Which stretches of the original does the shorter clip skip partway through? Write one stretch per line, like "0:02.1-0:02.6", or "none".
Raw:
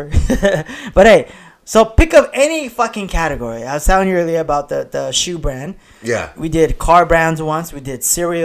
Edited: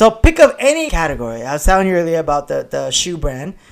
0:02.7-0:03.1